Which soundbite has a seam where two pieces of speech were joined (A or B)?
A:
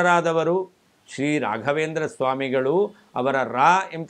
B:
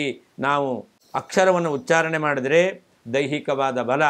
B